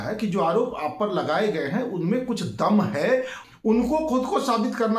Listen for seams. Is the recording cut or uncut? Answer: cut